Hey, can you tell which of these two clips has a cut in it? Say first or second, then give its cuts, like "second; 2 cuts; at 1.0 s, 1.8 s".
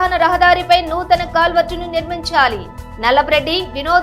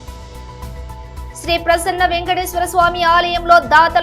second; 1 cut; at 1.4 s